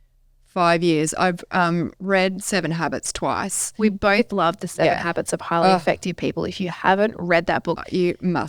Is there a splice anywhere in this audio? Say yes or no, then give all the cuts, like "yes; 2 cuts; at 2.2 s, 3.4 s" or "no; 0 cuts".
no; 0 cuts